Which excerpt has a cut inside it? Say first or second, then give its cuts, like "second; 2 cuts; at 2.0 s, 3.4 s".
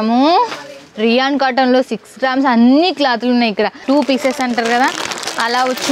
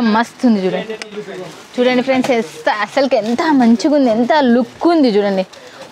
first; 1 cut; at 3.8 s